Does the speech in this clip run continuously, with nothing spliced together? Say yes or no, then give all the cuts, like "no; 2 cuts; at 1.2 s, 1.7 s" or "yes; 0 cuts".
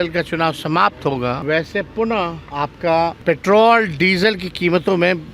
no; 3 cuts; at 1.4 s, 2.4 s, 3.2 s